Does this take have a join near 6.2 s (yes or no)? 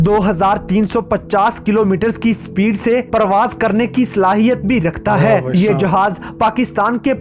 no